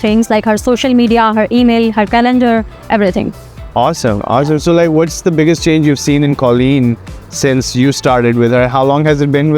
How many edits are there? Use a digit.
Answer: 0